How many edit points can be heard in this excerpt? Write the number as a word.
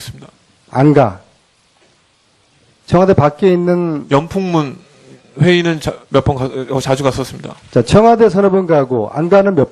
zero